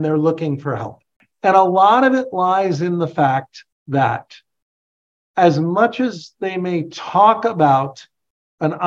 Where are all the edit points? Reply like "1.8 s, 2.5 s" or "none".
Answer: none